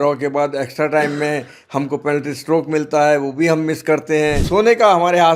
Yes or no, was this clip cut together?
yes